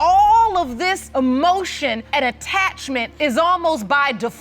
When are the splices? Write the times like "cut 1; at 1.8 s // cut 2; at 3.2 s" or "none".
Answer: cut 1; at 1.0 s // cut 2; at 2.0 s // cut 3; at 3.1 s